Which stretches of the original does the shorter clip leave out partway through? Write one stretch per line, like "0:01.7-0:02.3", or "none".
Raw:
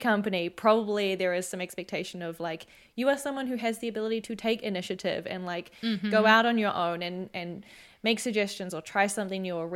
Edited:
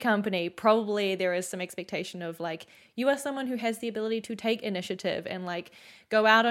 none